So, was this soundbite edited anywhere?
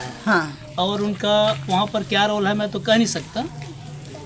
no; 0 cuts

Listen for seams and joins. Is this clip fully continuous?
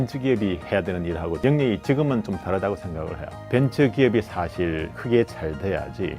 no; 2 cuts; at 1.4 s, 3.3 s

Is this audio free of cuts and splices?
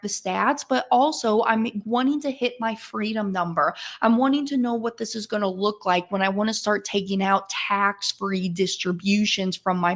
yes; 0 cuts

